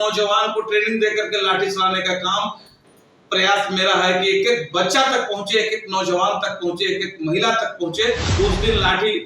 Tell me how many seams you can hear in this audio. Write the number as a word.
one